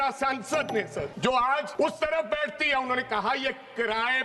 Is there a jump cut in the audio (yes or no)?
yes